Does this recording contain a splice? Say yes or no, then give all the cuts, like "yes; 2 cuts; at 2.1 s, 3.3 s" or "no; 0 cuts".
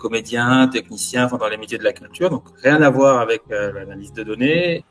no; 0 cuts